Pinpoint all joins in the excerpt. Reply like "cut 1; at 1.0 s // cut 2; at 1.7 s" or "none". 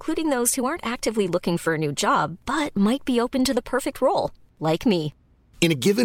none